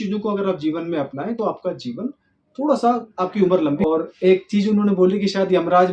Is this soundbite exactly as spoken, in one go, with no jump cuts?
no; 1 cut; at 3.8 s

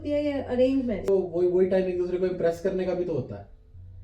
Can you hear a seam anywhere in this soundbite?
yes; 1 cut; at 1.1 s

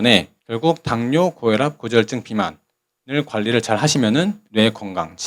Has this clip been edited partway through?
no; 0 cuts

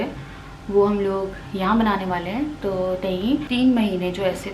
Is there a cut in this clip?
yes; 1 cut; at 3.5 s

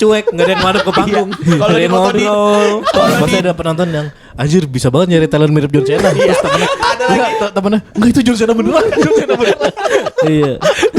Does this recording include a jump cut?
yes; 1 cut; at 3.1 s

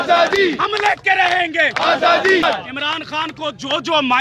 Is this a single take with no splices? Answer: no; 1 cut; at 2.4 s

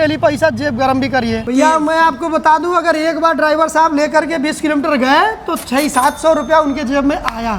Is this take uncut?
no; 1 cut; at 1.4 s

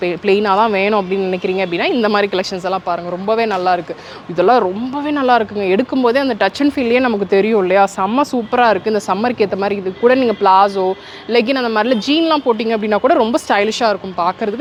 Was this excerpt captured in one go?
yes; 0 cuts

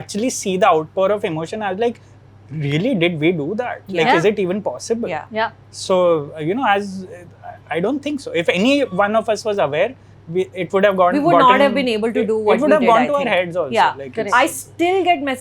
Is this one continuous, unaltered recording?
yes; 0 cuts

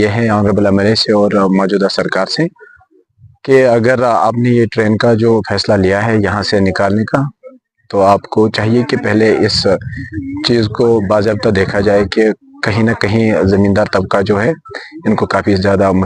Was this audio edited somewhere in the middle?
no; 0 cuts

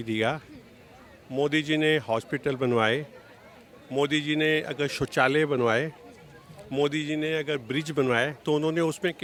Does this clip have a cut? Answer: no; 0 cuts

